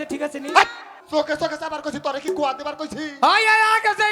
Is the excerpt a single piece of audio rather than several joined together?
no; 1 cut; at 0.9 s

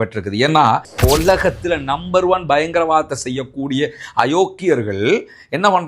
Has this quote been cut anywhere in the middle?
yes; 1 cut; at 0.9 s

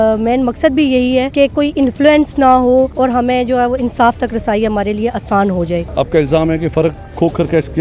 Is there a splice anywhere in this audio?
yes; 3 cuts; at 1.3 s, 2.9 s, 5.9 s

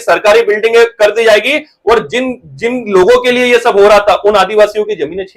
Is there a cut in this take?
no; 0 cuts

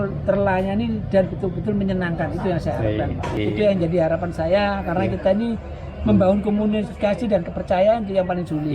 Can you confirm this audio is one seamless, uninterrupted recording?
no; 1 cut; at 3.4 s

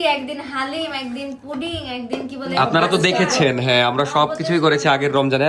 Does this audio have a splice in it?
no; 0 cuts

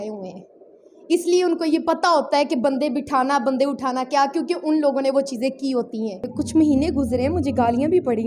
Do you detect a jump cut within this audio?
yes; 1 cut; at 6.4 s

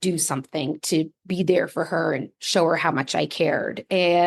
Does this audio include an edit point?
no; 0 cuts

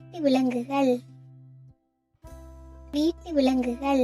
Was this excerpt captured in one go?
no; 2 cuts; at 1.2 s, 2.9 s

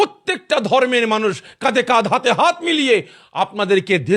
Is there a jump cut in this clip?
no; 0 cuts

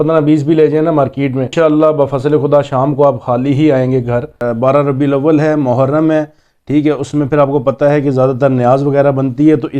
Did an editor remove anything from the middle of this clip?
yes; 2 cuts; at 1.5 s, 4.4 s

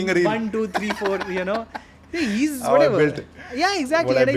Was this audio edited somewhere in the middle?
no; 0 cuts

